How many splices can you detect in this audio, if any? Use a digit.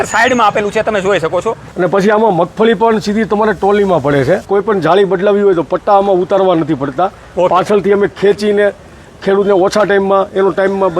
2